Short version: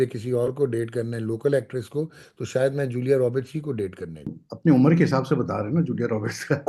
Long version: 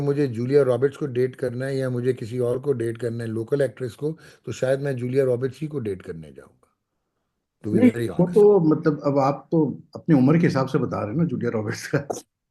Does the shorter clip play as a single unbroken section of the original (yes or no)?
no